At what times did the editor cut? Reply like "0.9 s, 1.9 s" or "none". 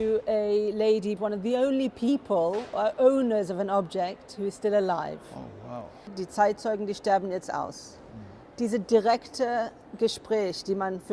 1.1 s, 6.2 s